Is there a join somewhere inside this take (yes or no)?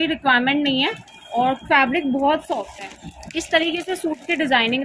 no